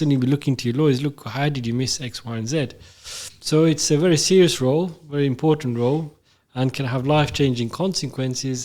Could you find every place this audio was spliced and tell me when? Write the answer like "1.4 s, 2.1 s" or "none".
none